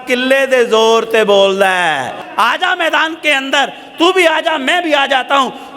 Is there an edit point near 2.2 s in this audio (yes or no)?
yes